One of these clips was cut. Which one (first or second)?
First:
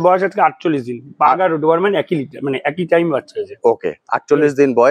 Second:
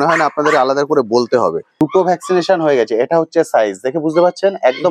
second